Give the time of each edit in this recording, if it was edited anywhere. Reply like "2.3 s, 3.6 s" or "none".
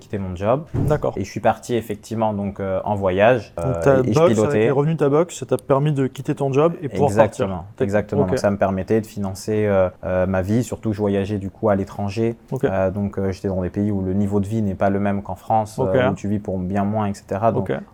none